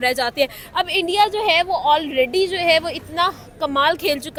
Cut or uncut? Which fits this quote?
uncut